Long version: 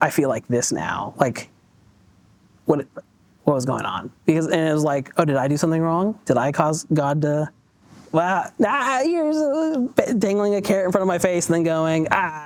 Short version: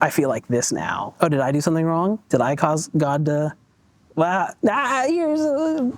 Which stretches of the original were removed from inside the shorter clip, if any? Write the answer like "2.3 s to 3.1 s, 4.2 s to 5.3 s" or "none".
1.1 s to 5.1 s